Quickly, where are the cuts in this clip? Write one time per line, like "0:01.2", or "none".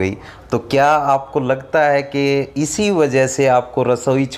none